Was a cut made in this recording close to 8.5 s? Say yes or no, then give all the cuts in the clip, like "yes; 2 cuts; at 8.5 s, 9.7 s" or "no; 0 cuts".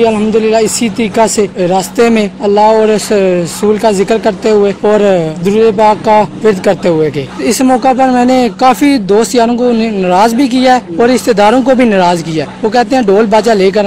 yes; 4 cuts; at 1.5 s, 4.8 s, 7.3 s, 8.5 s